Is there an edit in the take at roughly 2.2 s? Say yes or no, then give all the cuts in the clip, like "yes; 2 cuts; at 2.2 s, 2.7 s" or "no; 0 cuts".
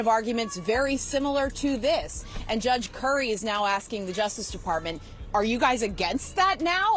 no; 0 cuts